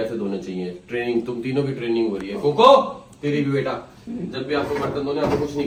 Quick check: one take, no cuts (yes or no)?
yes